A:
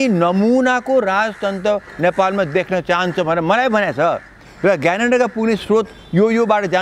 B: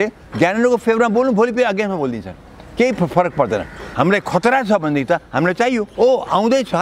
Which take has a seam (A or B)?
B